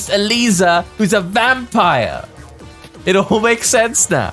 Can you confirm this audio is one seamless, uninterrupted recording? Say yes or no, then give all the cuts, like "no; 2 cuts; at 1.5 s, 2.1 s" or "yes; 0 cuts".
yes; 0 cuts